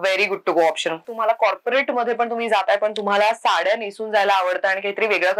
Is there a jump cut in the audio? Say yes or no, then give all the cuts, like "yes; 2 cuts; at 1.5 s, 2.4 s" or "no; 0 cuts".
yes; 1 cut; at 1.1 s